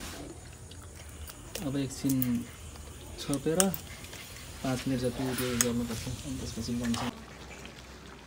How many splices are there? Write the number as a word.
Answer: one